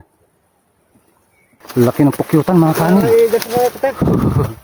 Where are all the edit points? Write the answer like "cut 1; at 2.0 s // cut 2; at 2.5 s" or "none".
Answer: cut 1; at 1.5 s